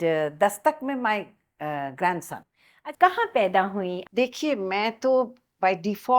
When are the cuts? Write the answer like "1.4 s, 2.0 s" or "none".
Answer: 2.7 s, 4.0 s